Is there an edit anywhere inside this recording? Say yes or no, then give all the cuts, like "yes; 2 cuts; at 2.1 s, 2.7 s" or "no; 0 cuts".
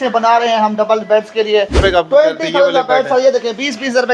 yes; 1 cut; at 1.8 s